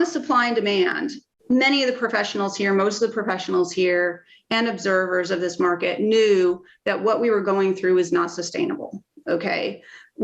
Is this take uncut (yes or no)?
no